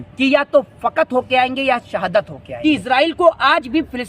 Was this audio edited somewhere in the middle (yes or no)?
yes